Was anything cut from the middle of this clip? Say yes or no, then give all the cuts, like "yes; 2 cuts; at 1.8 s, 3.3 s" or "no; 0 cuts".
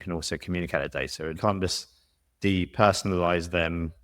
yes; 1 cut; at 1.4 s